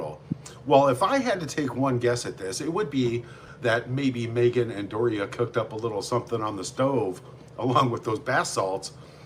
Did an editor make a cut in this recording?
no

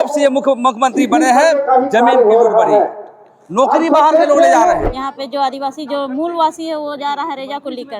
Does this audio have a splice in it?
yes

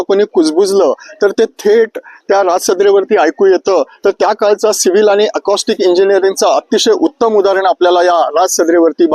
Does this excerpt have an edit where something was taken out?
no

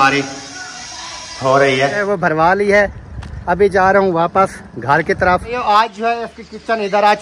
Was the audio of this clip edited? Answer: yes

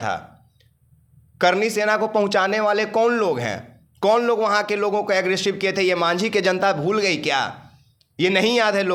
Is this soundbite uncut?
yes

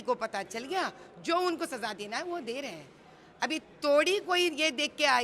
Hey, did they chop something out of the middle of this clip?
no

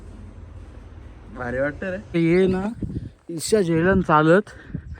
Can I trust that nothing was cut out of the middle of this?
no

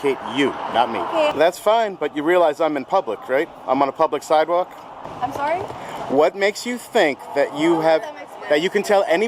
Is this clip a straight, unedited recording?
no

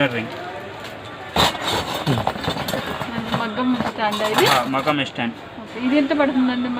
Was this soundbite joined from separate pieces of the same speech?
yes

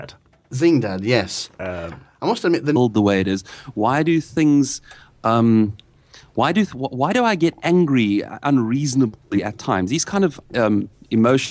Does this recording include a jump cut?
no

